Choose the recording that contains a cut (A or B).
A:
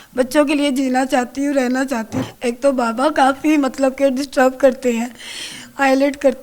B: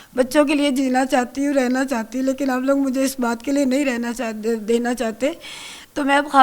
A